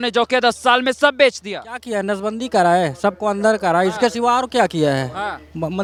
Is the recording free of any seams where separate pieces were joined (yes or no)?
yes